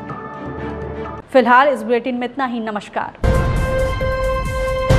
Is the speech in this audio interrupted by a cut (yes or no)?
no